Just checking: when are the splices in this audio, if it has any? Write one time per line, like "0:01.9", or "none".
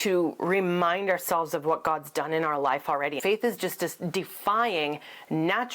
0:03.2

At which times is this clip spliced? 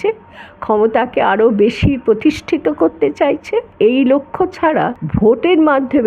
0:03.7
0:05.0

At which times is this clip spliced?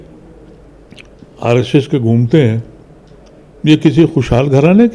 none

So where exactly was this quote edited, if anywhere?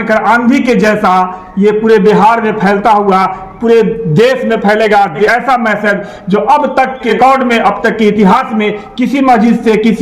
0:05.3
0:07.1

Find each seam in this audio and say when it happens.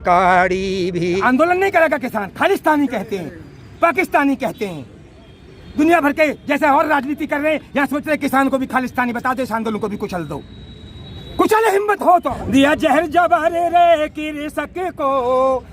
0:01.2
0:12.4

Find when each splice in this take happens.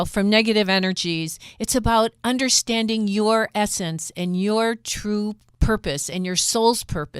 0:05.5

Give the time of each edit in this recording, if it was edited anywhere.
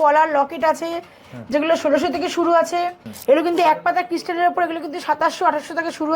0:03.0

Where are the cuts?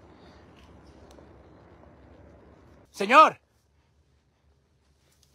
0:02.9

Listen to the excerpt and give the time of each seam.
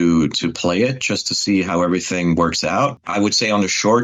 0:03.0

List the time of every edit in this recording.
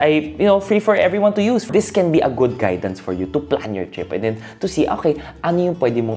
0:01.6

